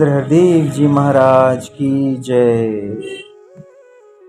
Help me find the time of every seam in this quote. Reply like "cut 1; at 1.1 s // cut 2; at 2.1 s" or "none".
none